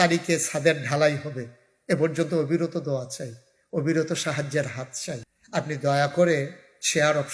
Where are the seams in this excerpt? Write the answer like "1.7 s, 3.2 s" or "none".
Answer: 5.3 s